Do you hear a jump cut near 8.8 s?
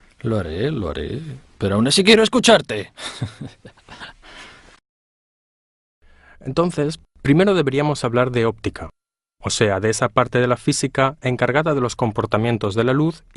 no; 0 cuts

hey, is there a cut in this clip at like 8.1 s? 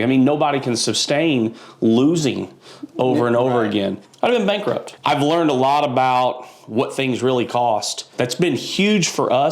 yes; 3 cuts; at 4.0 s, 4.9 s, 8.1 s

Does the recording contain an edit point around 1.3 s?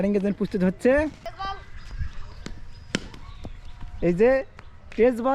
yes; 1 cut; at 1.3 s

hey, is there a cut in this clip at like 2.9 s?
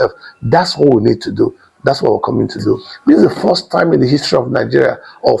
yes; 1 cut; at 2.9 s

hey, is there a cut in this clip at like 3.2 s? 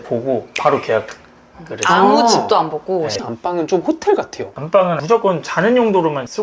yes; 1 cut; at 3.2 s

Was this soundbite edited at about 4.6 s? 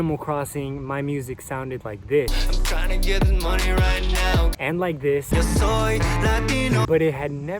yes; 2 cuts; at 4.6 s, 6.9 s

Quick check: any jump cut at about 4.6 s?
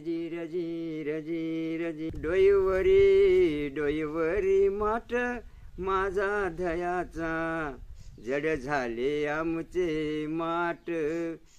no; 1 cut; at 2.2 s

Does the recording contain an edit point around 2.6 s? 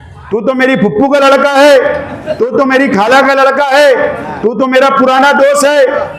no; 0 cuts

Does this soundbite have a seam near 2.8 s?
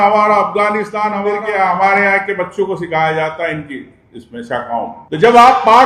no; 1 cut; at 1.2 s

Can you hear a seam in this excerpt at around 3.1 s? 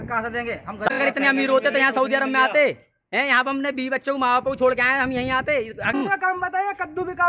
no; 2 cuts; at 0.9 s, 5.9 s

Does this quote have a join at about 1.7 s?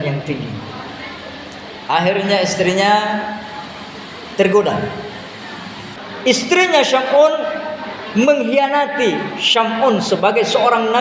no; 1 cut; at 6.0 s

